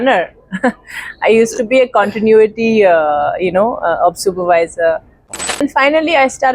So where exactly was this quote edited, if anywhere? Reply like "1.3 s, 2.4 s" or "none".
5.4 s